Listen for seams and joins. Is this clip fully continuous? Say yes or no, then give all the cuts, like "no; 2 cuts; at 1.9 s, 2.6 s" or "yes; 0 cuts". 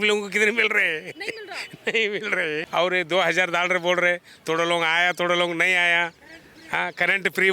no; 1 cut; at 2.6 s